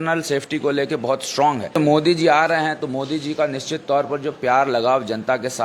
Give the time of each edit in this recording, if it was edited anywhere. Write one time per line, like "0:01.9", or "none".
0:01.8